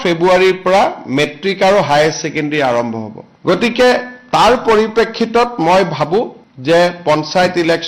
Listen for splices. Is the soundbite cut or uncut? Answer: uncut